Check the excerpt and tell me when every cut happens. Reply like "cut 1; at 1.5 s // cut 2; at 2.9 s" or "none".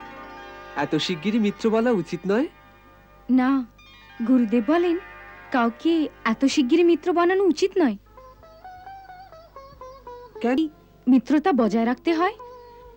cut 1; at 10.6 s

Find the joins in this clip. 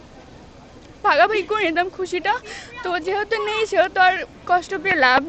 cut 1; at 4.3 s

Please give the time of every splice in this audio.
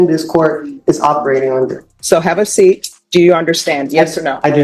cut 1; at 1.9 s // cut 2; at 2.9 s

